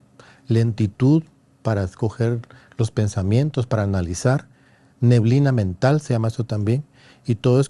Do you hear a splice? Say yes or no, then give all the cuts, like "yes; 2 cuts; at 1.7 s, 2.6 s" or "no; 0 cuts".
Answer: no; 0 cuts